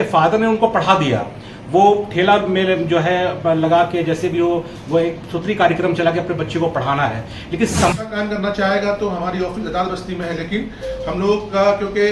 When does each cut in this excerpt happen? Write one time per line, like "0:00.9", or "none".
0:07.9